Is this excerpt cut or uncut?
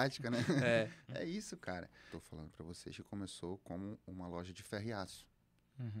cut